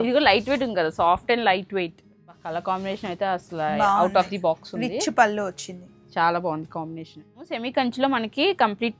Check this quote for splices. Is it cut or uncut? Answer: cut